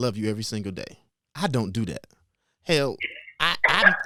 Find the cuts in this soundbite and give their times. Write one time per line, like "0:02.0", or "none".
none